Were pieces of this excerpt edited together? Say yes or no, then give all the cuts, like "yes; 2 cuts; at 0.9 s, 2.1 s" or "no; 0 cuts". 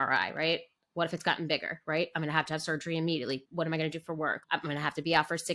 yes; 2 cuts; at 3.4 s, 4.4 s